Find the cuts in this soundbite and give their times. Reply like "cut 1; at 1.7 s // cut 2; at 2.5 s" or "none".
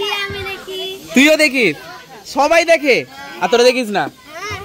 none